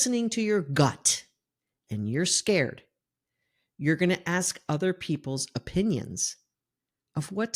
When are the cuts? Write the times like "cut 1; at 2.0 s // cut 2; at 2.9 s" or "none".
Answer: none